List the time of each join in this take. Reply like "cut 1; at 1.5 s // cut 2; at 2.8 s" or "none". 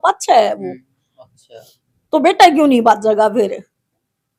none